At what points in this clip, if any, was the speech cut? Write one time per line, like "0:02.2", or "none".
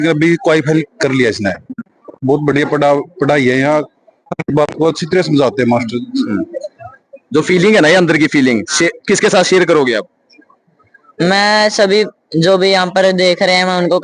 0:06.2